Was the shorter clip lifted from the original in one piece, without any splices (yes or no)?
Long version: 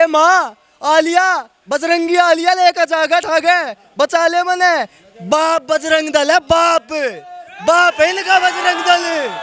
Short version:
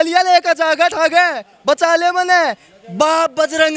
yes